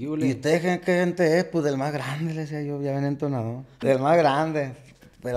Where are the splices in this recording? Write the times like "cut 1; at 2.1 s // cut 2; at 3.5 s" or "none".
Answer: cut 1; at 3.8 s